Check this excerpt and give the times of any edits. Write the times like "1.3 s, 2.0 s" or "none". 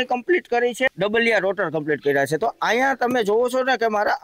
0.9 s